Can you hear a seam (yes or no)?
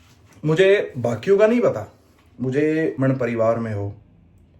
yes